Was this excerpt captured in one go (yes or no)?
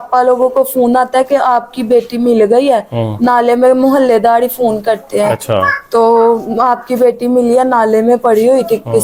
yes